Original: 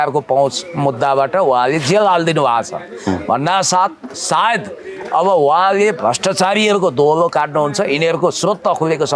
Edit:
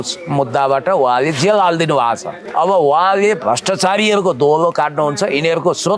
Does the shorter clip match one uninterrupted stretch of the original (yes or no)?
no